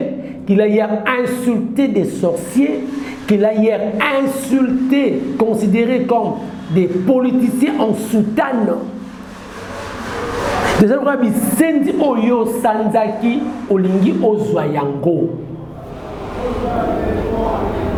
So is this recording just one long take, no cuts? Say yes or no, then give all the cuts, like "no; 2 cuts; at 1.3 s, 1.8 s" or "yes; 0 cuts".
yes; 0 cuts